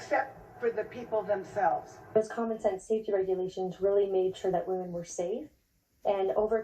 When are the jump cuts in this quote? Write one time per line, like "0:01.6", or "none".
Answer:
0:02.2